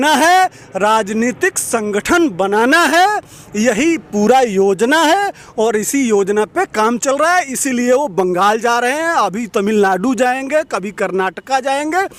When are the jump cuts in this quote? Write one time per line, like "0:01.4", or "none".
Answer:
none